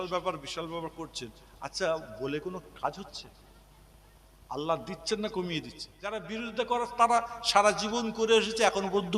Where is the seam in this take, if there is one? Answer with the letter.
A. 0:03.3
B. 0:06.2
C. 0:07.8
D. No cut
B